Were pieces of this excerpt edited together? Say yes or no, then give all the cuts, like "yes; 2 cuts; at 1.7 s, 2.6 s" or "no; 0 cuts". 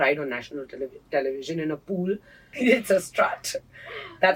yes; 1 cut; at 2.5 s